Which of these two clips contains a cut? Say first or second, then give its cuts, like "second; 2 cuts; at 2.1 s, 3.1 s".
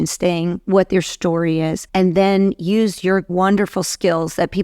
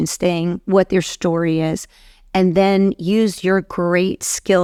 first; 2 cuts; at 1.8 s, 3.3 s